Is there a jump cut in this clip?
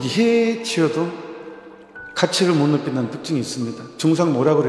no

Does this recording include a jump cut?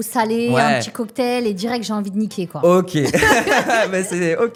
no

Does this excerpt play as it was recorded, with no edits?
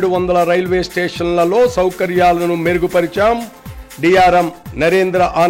yes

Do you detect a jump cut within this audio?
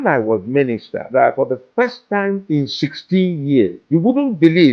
yes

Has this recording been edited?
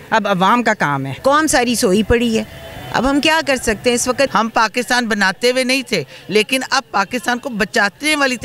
yes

